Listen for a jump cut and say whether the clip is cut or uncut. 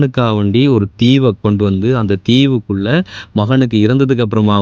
cut